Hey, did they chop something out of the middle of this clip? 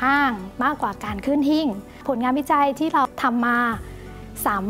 yes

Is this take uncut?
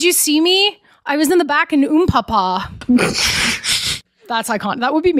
yes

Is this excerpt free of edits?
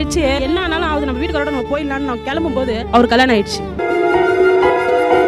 yes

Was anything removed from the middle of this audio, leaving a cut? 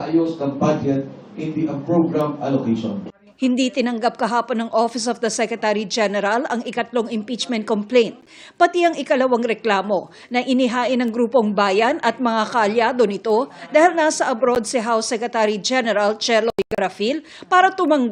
no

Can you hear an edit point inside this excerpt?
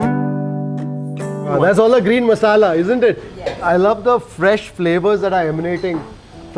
no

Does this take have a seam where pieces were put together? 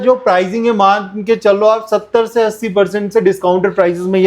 no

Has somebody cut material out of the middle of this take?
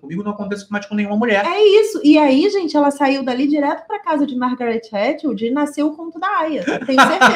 no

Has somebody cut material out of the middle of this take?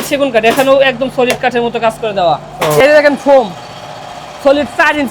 yes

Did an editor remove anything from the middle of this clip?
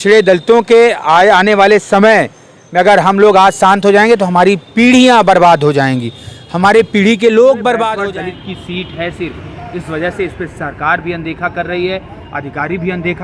yes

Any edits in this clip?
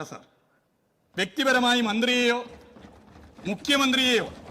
no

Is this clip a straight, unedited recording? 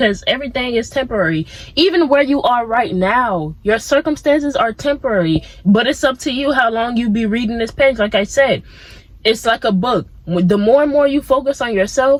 yes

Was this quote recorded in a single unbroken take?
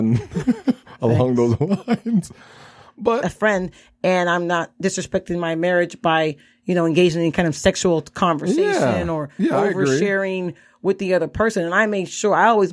no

